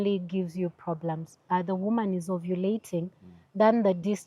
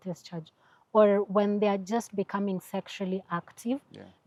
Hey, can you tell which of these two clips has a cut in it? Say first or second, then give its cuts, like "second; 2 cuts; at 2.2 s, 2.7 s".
first; 1 cut; at 1.4 s